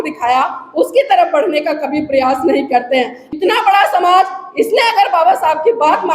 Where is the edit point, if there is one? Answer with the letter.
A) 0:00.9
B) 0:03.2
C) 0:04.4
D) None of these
B